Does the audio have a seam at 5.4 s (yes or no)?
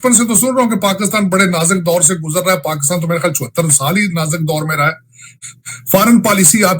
yes